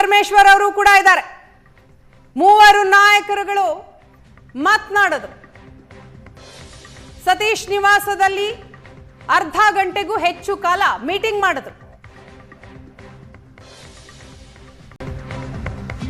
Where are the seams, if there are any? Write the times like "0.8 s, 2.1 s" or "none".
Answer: 15.0 s

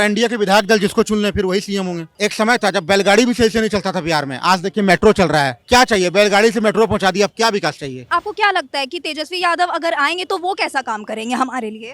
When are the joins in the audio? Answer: 2.1 s, 8.1 s

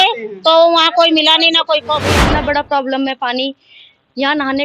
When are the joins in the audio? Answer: 2.0 s

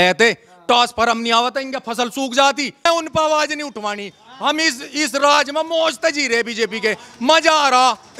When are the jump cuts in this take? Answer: 2.9 s

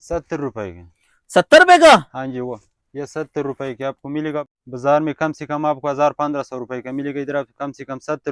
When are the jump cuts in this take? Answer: 4.5 s

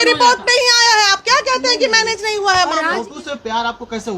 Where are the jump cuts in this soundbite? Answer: 3.0 s

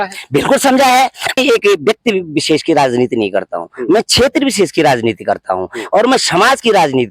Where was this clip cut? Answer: 1.4 s

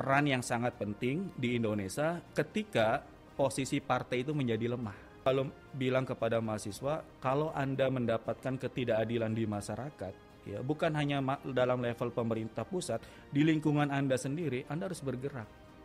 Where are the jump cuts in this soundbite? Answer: 5.3 s

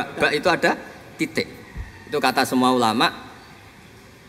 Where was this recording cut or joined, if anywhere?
none

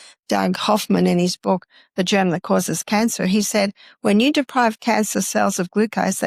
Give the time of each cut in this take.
none

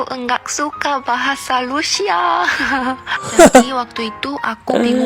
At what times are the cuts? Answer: none

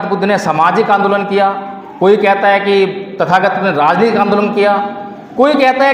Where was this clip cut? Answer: none

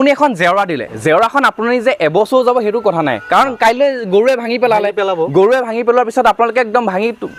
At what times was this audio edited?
none

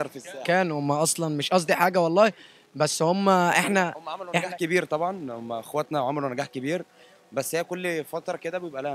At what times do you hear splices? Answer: none

